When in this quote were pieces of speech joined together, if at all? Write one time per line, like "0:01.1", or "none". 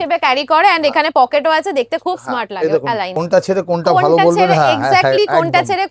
0:03.1